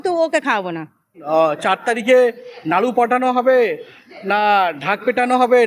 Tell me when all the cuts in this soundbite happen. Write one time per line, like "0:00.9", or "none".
0:01.2